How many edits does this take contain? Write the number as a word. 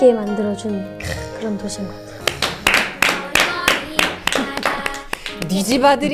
one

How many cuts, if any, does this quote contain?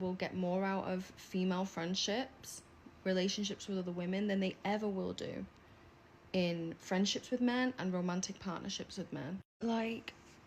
one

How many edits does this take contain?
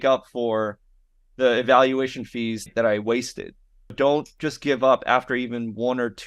two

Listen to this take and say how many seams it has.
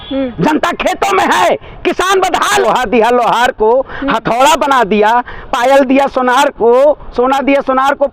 one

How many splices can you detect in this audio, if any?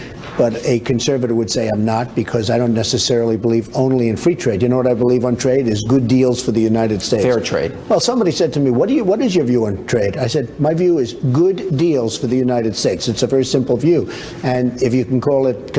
one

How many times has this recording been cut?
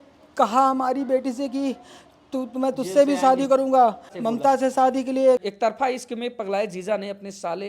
two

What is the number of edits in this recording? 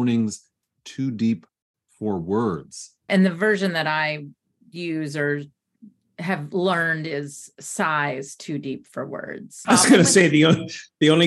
two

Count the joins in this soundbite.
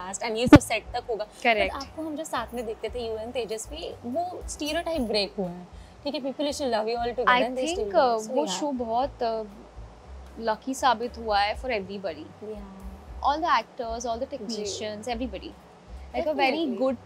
zero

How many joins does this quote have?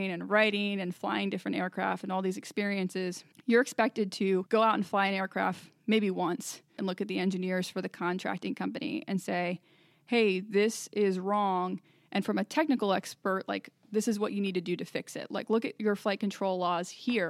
three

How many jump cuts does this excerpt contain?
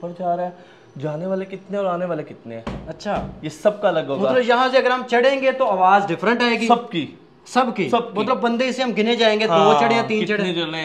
zero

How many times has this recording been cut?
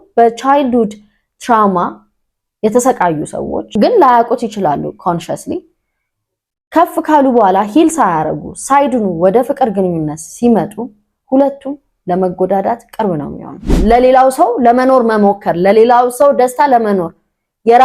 two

